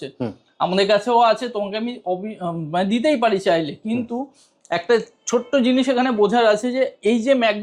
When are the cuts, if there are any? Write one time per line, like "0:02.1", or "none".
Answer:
none